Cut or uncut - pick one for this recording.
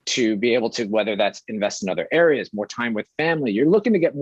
uncut